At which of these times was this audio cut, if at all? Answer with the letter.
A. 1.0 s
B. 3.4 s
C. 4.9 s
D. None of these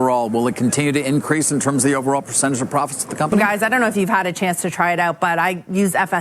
B